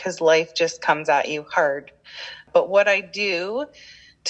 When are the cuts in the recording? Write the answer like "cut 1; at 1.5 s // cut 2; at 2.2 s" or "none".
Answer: cut 1; at 2.4 s